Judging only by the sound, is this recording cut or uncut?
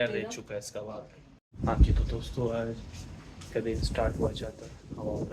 cut